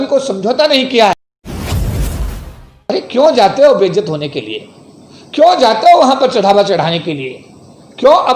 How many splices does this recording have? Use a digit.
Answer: 2